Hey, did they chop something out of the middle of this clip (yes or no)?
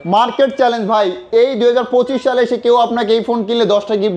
no